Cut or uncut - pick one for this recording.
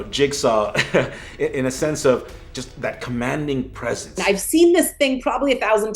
cut